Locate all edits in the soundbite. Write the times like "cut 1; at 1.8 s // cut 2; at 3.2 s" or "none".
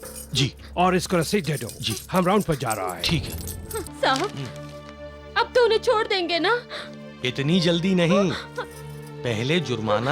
cut 1; at 3.9 s